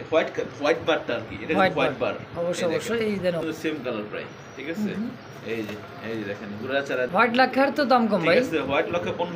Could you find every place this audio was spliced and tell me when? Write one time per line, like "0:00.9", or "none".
0:03.4
0:07.1